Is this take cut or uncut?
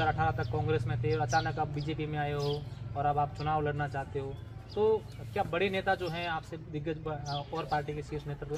uncut